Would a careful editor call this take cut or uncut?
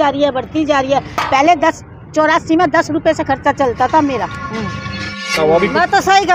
cut